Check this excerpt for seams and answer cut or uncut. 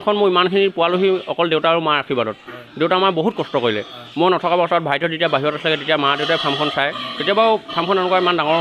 uncut